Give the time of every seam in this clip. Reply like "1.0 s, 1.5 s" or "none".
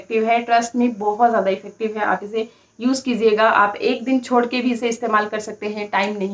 none